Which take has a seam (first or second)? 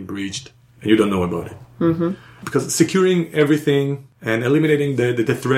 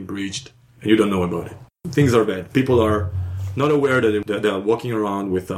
second